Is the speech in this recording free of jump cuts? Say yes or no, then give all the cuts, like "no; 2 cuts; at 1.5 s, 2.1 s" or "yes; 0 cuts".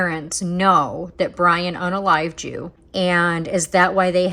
no; 1 cut; at 2.7 s